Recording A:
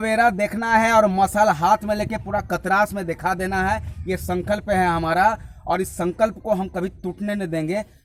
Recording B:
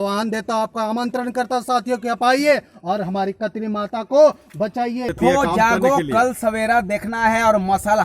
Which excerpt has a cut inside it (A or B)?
B